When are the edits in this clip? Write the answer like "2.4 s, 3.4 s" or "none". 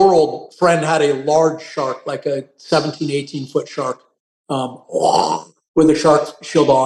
none